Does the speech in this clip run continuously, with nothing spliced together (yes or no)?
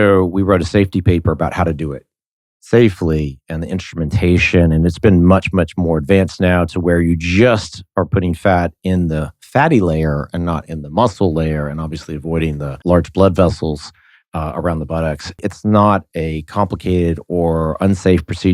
no